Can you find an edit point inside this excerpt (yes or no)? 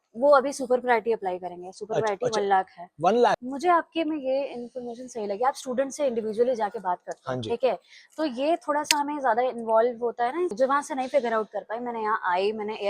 yes